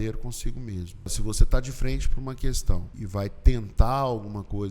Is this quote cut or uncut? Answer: cut